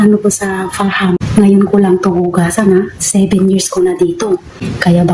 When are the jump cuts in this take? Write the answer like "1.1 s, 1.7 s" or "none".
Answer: 1.2 s